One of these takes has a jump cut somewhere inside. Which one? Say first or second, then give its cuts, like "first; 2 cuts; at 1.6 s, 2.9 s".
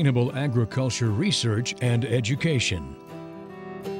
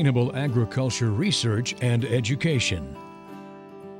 first; 1 cut; at 2.9 s